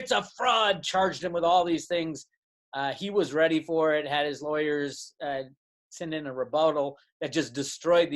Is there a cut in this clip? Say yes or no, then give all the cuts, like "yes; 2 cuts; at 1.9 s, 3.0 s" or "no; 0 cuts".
no; 0 cuts